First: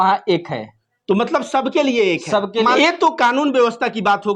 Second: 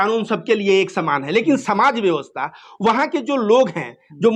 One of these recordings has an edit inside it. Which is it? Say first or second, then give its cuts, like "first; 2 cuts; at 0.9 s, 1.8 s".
first; 1 cut; at 2.8 s